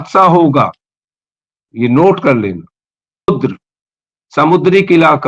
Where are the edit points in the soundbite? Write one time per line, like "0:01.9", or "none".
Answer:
0:03.3